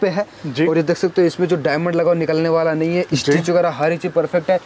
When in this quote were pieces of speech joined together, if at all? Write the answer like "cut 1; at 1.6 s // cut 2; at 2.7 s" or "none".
none